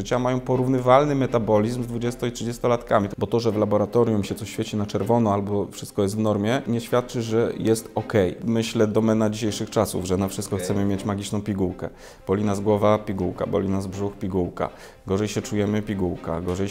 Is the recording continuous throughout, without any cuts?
no; 3 cuts; at 3.1 s, 6.7 s, 8.4 s

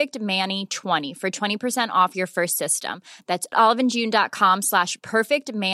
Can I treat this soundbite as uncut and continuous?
no; 1 cut; at 1.1 s

